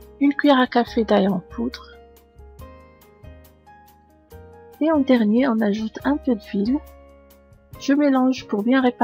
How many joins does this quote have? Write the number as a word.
zero